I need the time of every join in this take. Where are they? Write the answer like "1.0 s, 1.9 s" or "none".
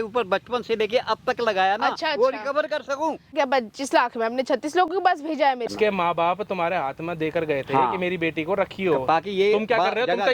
3.5 s, 5.7 s